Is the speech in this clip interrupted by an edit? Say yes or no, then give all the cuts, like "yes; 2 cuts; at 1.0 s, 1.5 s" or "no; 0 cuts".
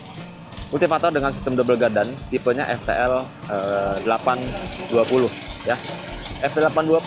no; 0 cuts